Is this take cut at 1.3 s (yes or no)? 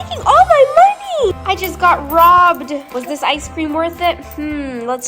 yes